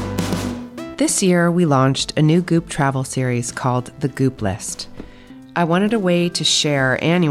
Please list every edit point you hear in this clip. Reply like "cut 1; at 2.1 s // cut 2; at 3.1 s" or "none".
cut 1; at 0.9 s